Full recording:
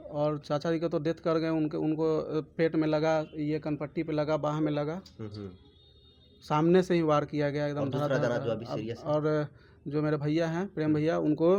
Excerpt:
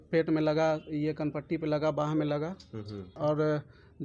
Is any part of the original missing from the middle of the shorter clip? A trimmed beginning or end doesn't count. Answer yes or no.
yes